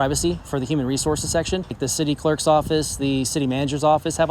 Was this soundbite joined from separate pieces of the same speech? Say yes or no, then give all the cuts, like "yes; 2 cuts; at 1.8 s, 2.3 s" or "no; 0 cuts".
yes; 1 cut; at 1.8 s